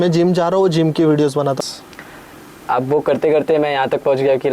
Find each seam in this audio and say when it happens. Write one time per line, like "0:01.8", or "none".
0:01.6